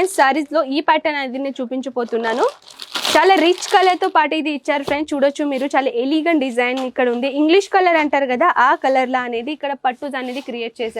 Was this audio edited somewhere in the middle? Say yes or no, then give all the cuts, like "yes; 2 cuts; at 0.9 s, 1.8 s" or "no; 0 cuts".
no; 0 cuts